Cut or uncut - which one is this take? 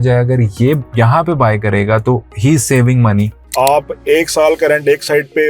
cut